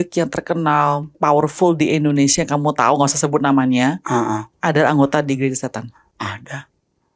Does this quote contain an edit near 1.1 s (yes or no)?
yes